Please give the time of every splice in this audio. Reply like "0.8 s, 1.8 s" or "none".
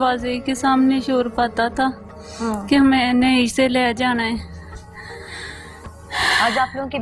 none